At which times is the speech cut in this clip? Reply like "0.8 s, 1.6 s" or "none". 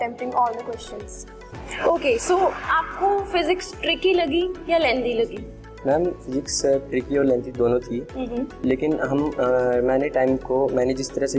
1.5 s